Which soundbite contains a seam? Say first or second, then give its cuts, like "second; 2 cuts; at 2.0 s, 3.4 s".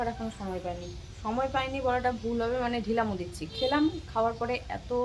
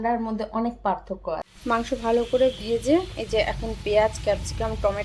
second; 1 cut; at 1.5 s